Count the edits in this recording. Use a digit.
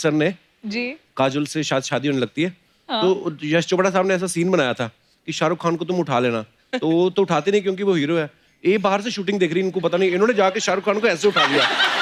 0